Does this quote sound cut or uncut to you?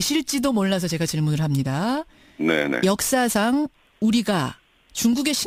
uncut